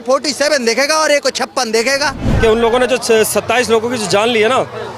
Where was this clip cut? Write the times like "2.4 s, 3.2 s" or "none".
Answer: 2.2 s